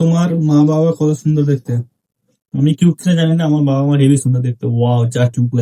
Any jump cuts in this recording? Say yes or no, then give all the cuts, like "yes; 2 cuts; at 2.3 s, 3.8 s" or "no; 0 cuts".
no; 0 cuts